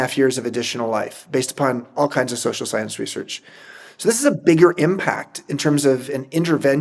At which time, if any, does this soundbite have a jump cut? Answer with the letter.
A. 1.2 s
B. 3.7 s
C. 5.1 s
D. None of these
D